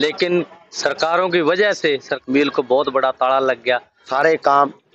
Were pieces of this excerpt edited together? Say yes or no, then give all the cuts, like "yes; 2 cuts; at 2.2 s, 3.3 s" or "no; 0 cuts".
yes; 2 cuts; at 2.1 s, 4.1 s